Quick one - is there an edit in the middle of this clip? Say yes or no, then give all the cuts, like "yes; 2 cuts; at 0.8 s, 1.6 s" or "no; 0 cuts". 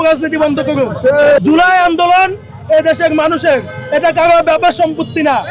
yes; 1 cut; at 1.4 s